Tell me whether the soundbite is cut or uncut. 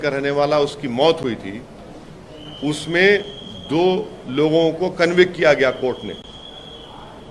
uncut